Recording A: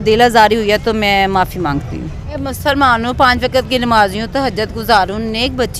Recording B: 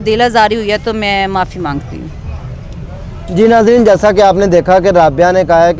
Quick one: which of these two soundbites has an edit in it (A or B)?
A